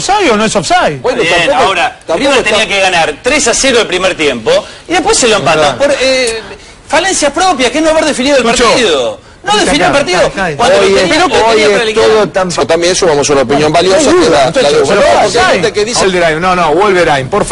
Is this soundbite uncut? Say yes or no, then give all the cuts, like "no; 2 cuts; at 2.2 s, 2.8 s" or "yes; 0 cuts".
yes; 0 cuts